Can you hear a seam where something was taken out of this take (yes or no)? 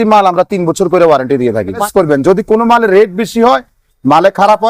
yes